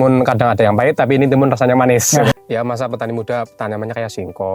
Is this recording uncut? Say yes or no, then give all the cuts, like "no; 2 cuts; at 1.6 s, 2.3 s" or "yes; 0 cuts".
no; 1 cut; at 2.3 s